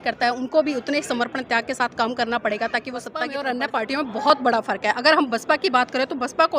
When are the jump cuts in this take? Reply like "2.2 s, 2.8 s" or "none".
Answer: 3.3 s